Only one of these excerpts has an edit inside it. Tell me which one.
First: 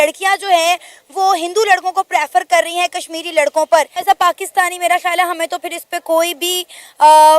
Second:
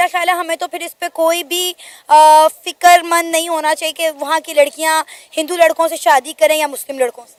first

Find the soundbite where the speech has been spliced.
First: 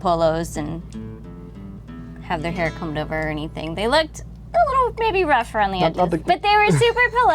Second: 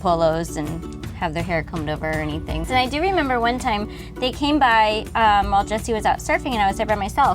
second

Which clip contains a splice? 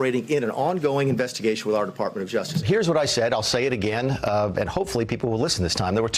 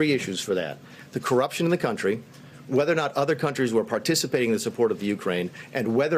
first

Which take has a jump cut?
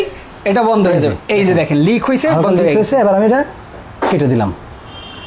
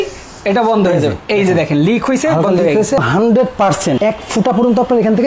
second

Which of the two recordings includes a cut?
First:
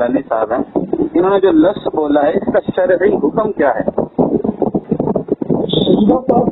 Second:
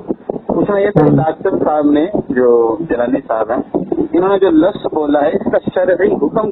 first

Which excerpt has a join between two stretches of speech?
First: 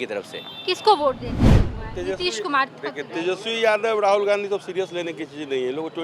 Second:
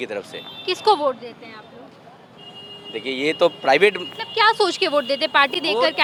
first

